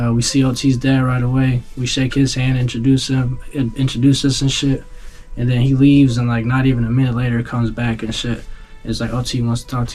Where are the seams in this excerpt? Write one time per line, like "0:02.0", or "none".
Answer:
none

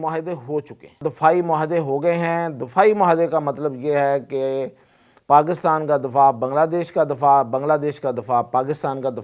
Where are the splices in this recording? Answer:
0:01.0

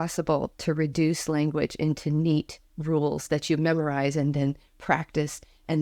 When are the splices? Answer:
none

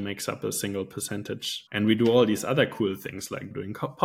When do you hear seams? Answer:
0:01.6

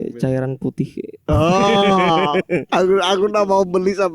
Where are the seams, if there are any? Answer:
0:01.1
0:02.7

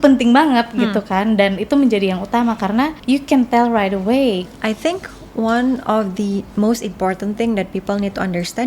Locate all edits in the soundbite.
0:03.0
0:04.5

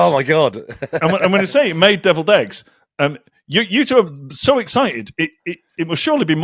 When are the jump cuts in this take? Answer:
none

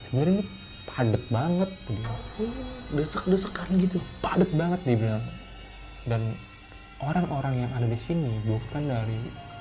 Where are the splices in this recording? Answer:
none

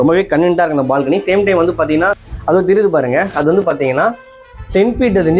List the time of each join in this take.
0:02.3

